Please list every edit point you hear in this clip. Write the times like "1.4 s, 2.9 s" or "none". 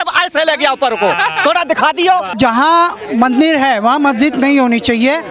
2.3 s